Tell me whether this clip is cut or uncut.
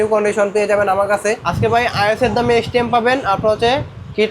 cut